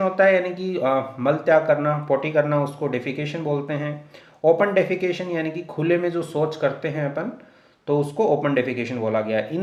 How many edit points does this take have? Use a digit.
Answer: 0